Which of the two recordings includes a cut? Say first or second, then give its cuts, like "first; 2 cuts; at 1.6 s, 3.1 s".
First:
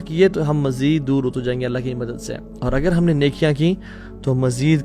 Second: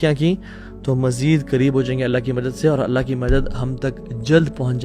first; 1 cut; at 2.5 s